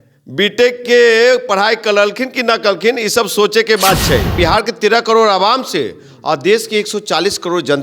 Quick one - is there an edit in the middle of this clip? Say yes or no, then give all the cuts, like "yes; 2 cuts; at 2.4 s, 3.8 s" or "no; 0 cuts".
yes; 1 cut; at 4.3 s